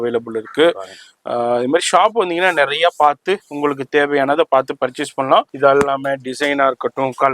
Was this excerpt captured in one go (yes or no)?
no